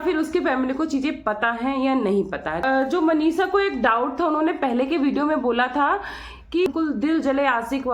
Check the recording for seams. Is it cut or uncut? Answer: cut